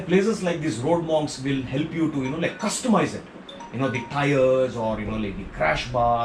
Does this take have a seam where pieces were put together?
no; 0 cuts

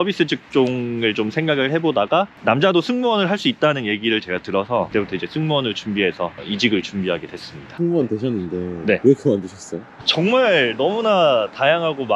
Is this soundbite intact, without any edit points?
yes; 0 cuts

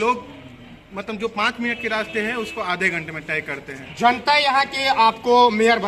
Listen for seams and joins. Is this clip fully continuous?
yes; 0 cuts

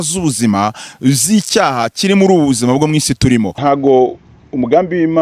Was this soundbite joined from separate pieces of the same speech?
no; 0 cuts

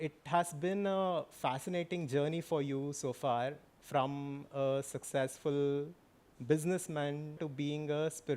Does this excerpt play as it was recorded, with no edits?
no; 1 cut; at 7.5 s

